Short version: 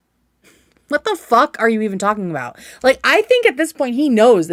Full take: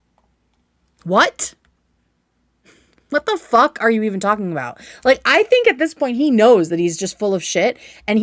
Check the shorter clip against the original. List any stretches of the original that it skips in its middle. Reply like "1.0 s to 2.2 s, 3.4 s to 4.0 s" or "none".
none